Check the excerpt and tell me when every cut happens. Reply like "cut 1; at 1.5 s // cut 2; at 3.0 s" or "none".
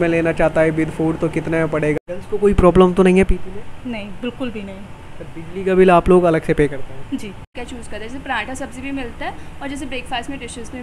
cut 1; at 2.1 s // cut 2; at 7.5 s